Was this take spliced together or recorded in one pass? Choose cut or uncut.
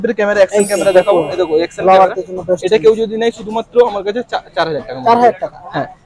uncut